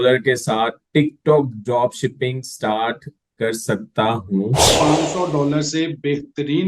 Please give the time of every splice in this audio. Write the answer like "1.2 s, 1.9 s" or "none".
4.7 s